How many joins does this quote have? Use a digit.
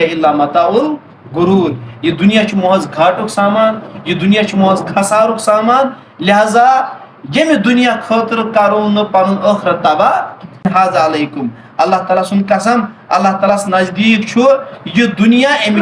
1